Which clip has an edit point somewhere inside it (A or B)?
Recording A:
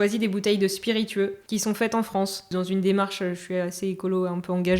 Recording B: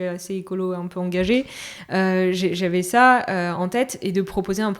A